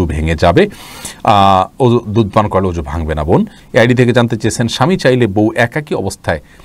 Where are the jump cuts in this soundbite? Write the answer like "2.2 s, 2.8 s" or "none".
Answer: none